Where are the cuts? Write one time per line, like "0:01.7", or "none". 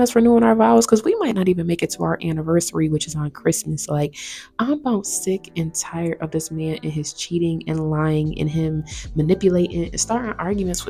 none